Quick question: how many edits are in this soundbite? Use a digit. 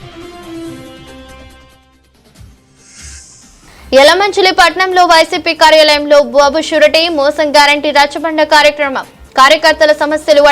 1